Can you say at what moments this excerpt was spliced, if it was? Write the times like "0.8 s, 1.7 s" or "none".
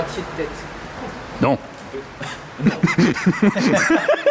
none